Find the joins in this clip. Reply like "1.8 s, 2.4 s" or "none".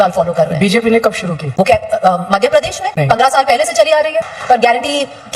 4.2 s